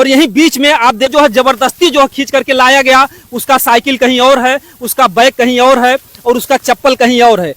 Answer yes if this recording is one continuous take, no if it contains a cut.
no